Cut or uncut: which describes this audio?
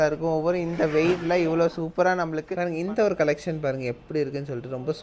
cut